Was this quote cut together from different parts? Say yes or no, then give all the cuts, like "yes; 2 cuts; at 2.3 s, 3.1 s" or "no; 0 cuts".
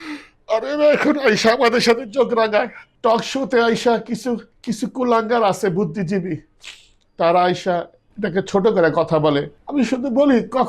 yes; 3 cuts; at 2.8 s, 4.5 s, 9.6 s